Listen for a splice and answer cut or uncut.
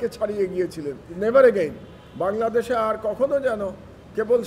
cut